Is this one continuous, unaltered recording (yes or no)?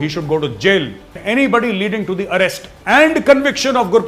no